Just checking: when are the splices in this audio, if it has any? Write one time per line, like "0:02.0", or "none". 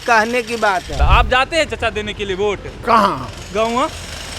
0:00.9